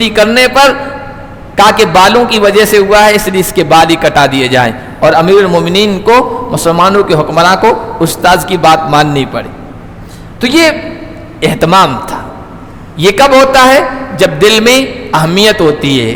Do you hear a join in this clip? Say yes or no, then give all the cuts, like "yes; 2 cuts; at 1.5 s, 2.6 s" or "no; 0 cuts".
no; 0 cuts